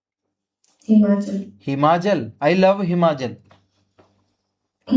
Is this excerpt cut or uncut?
uncut